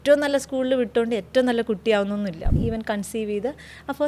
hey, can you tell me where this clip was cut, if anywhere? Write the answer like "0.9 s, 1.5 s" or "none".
2.5 s